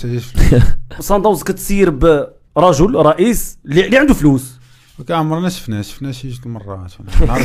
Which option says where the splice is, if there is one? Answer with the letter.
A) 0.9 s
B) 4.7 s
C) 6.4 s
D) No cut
A